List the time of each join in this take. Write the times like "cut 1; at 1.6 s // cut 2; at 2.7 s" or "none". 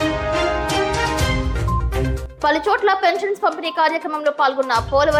none